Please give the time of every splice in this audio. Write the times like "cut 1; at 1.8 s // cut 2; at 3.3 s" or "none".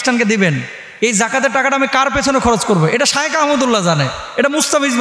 none